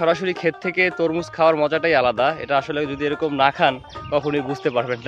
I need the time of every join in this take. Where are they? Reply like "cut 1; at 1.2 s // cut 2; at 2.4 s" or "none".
none

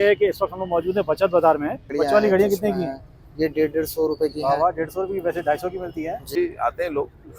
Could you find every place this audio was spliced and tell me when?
cut 1; at 1.8 s // cut 2; at 6.4 s

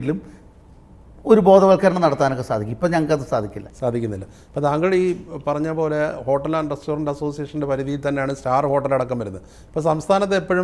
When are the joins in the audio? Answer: none

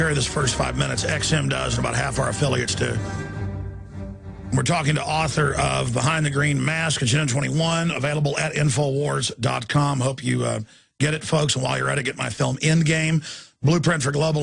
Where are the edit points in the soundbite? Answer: cut 1; at 10.4 s

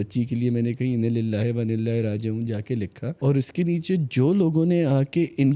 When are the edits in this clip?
cut 1; at 3.1 s

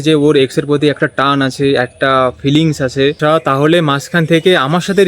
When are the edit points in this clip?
cut 1; at 3.2 s

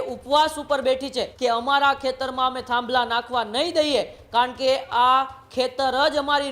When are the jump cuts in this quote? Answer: cut 1; at 1.3 s

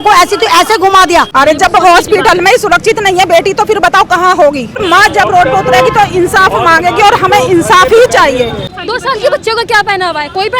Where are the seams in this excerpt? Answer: cut 1; at 1.3 s // cut 2; at 4.8 s // cut 3; at 8.6 s

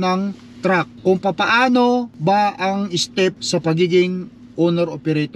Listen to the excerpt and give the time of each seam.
cut 1; at 0.9 s // cut 2; at 2.1 s // cut 3; at 3.4 s

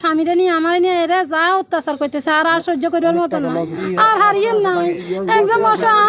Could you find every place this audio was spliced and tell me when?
cut 1; at 3.8 s // cut 2; at 5.0 s

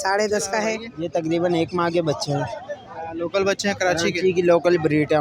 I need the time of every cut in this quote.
cut 1; at 0.9 s

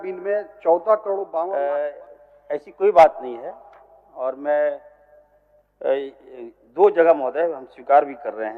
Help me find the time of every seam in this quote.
cut 1; at 1.3 s

